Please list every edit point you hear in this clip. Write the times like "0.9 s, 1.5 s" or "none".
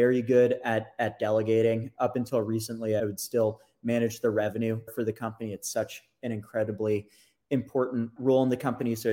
1.9 s, 3.0 s, 4.9 s, 8.1 s

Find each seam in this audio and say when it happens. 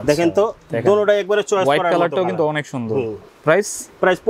3.2 s

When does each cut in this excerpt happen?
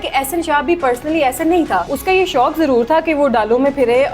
1.9 s

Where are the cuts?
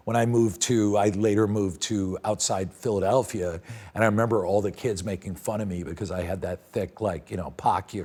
none

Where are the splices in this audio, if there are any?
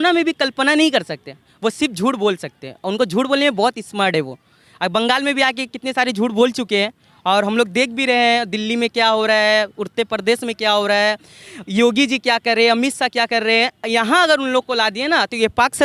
none

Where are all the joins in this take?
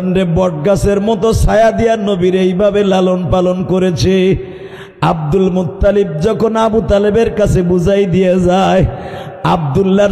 none

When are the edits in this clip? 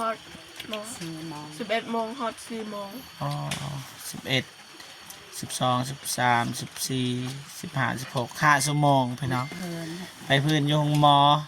none

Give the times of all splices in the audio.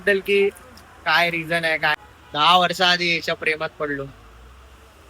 1.9 s

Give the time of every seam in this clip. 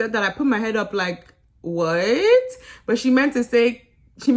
none

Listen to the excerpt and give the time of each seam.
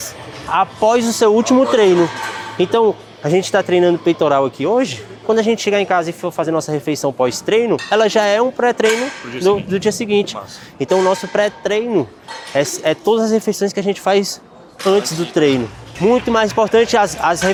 none

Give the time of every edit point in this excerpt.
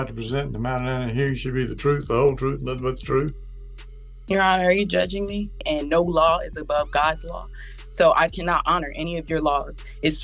5.6 s

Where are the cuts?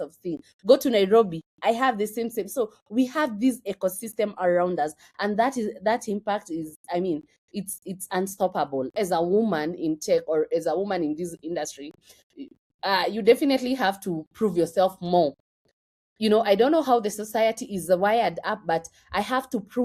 9.0 s

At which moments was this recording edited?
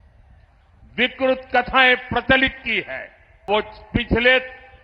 3.5 s

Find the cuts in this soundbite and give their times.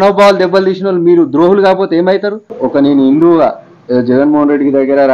2.5 s

